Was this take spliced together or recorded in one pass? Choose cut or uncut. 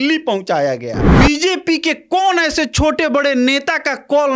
cut